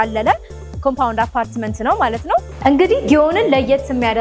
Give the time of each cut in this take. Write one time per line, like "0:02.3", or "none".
0:02.5